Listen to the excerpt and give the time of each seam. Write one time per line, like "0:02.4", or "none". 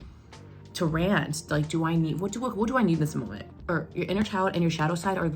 0:03.6